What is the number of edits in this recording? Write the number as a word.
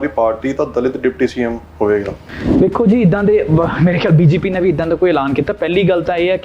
one